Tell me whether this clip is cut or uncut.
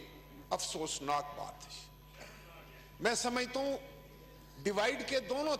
uncut